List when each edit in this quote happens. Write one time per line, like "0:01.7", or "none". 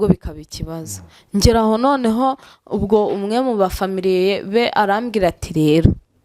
none